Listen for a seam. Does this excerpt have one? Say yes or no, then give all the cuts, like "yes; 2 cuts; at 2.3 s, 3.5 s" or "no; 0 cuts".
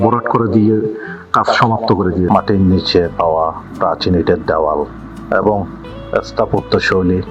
yes; 1 cut; at 2.3 s